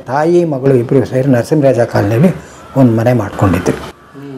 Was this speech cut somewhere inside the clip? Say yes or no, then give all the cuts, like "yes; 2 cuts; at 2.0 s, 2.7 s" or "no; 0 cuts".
no; 0 cuts